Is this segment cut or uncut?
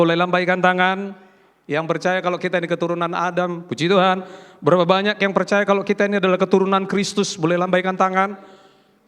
uncut